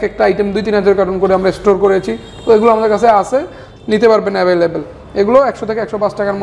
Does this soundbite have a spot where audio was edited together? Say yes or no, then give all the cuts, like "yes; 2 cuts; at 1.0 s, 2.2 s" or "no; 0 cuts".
no; 0 cuts